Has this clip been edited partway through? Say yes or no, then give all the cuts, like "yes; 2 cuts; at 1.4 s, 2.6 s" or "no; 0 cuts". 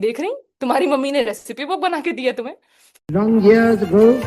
yes; 1 cut; at 3.0 s